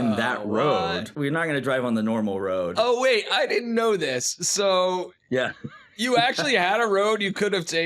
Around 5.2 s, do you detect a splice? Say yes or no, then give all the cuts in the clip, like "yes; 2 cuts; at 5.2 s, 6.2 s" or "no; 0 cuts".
no; 2 cuts; at 1.1 s, 2.7 s